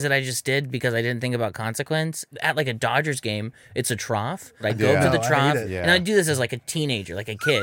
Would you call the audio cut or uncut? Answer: cut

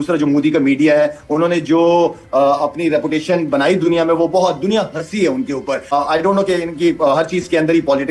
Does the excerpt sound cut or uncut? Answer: uncut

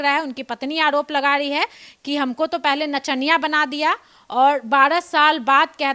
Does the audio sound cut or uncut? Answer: uncut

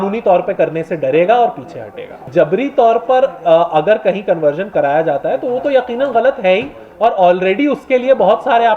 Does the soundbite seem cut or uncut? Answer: cut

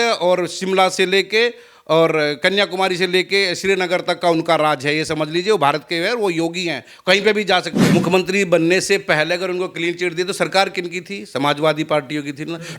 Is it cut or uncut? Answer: cut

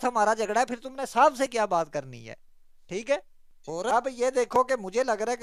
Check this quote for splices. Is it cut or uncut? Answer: uncut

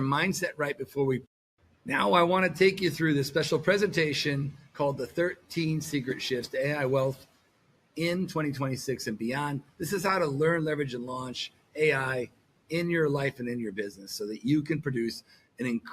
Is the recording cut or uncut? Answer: cut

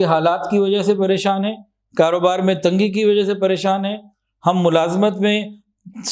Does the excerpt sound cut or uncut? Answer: uncut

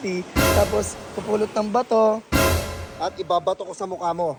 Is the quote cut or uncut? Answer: uncut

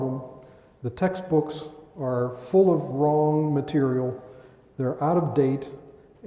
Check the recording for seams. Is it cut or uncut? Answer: uncut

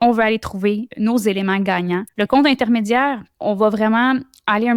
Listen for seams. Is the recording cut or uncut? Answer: cut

